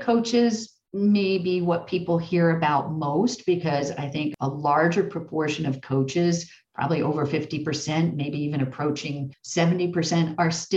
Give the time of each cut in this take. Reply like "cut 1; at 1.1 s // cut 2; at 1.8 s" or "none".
cut 1; at 4.3 s // cut 2; at 9.3 s